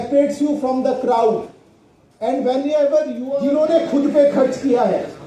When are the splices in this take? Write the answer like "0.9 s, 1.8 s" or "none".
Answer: 3.3 s